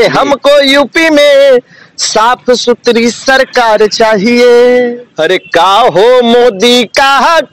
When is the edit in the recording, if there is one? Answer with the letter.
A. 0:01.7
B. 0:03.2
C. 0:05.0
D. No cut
C